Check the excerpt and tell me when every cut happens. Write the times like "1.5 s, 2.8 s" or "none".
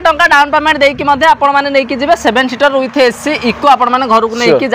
none